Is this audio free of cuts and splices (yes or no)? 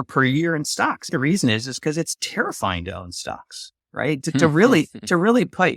no